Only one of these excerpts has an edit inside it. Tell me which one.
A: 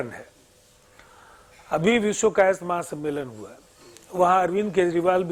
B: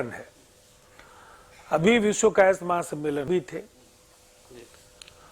B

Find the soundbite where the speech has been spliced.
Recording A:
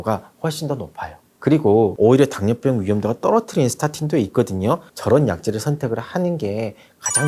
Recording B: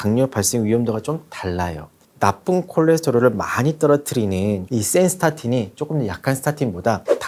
A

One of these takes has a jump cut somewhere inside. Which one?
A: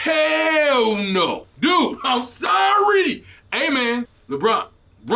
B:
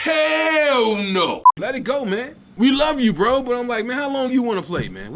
B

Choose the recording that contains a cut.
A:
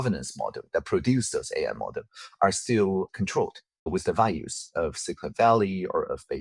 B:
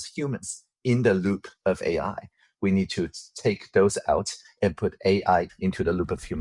B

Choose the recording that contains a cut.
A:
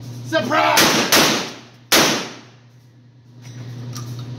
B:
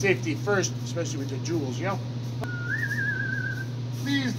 B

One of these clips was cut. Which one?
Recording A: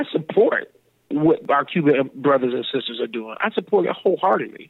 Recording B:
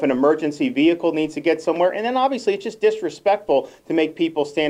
A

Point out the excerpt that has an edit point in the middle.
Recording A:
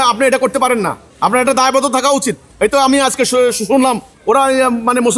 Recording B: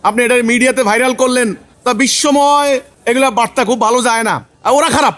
A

